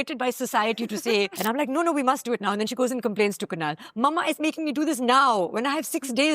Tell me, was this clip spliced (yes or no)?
yes